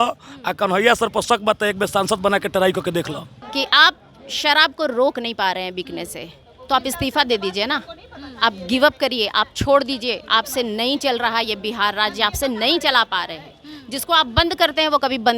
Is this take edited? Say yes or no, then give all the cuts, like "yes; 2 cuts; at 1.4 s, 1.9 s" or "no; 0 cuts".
yes; 1 cut; at 3.4 s